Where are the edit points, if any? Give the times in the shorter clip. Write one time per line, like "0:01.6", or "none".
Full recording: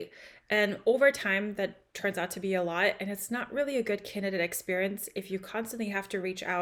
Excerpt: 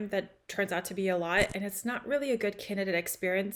none